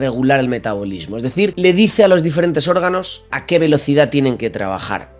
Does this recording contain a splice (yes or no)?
yes